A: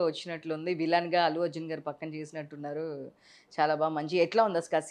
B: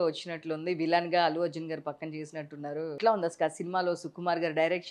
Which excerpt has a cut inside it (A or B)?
B